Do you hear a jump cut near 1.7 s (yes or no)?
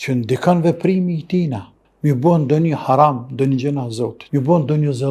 no